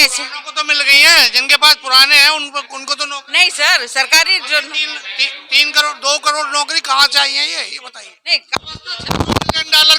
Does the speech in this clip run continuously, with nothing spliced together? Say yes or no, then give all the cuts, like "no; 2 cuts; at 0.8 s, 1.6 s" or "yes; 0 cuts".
no; 1 cut; at 8.5 s